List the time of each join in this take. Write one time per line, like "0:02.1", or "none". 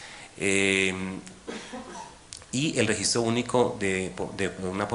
none